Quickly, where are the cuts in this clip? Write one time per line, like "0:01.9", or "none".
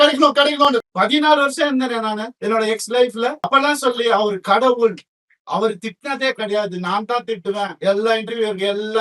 0:00.8
0:02.3
0:03.4